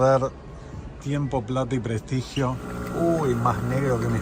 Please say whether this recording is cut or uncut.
cut